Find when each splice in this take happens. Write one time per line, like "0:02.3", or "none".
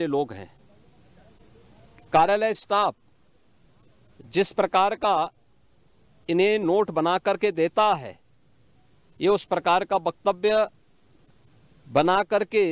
none